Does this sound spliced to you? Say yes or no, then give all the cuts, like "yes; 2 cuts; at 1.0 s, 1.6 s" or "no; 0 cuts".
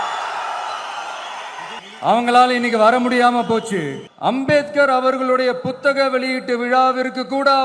yes; 2 cuts; at 1.8 s, 4.0 s